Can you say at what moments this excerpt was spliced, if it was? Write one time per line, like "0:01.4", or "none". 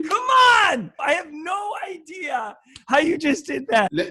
0:01.0